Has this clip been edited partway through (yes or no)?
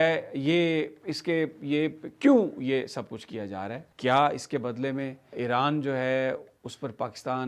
no